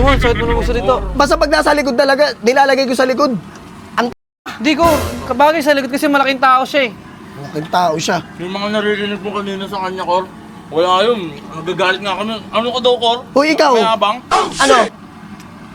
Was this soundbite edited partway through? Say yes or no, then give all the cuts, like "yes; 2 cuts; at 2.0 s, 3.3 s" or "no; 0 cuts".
no; 0 cuts